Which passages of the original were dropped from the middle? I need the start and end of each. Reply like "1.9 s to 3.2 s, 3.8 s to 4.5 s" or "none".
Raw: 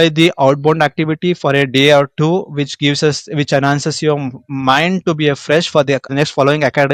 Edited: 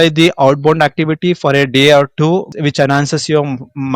2.5 s to 3.2 s